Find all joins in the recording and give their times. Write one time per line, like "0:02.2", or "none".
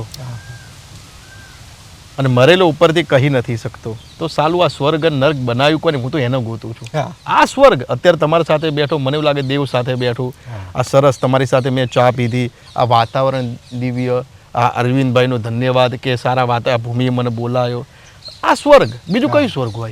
none